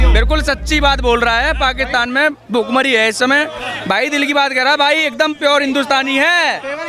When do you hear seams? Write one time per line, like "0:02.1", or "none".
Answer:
none